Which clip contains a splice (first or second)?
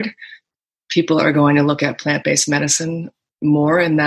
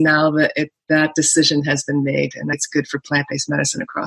second